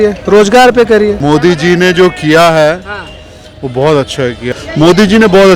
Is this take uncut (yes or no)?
no